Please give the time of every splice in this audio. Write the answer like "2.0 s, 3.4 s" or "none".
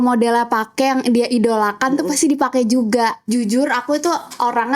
3.2 s